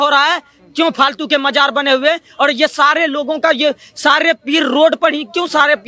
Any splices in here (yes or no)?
no